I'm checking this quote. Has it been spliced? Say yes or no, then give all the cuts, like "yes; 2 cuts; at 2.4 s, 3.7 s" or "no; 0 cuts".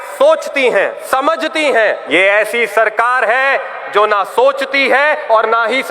yes; 2 cuts; at 1.0 s, 2.0 s